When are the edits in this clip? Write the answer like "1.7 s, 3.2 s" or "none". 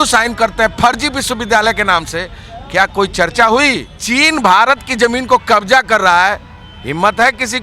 3.9 s